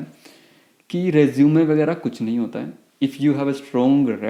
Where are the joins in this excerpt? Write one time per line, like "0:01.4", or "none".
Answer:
none